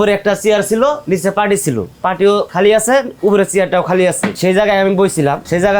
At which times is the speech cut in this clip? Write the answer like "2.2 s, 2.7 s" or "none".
1.0 s, 2.5 s, 4.3 s